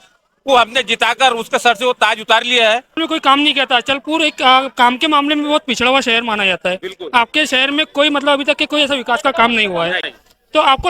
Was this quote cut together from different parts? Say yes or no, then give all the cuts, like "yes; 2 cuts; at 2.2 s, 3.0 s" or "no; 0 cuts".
yes; 1 cut; at 3.0 s